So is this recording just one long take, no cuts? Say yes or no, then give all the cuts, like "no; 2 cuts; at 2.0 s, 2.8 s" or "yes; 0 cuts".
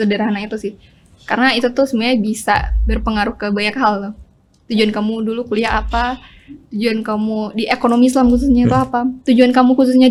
yes; 0 cuts